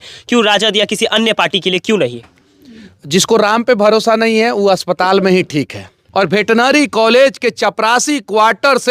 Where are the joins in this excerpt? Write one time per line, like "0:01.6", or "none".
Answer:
0:06.0